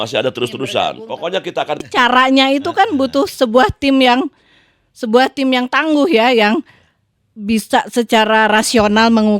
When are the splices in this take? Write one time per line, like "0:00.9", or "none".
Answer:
0:01.8